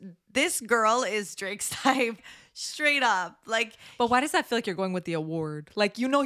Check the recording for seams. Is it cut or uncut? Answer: cut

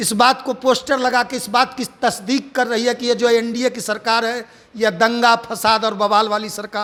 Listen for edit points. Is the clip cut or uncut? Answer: uncut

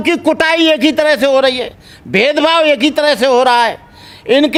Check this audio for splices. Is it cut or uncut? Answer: uncut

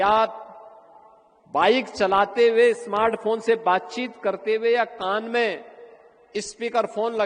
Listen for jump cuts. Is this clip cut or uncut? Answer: uncut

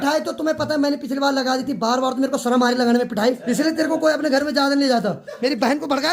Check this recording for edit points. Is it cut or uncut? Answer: cut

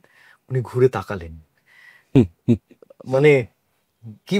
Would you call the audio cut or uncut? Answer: uncut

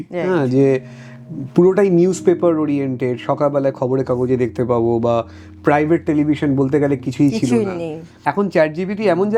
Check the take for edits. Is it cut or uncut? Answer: cut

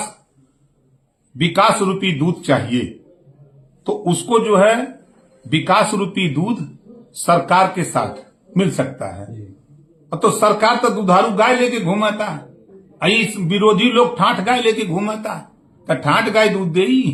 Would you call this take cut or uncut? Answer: uncut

